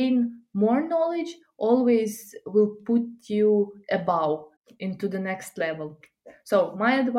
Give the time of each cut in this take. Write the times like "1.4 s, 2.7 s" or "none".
4.6 s